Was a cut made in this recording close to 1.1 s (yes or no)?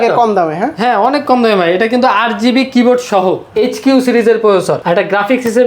no